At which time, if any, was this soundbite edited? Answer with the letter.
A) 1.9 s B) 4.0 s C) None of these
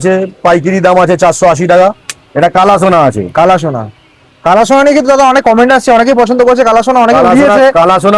A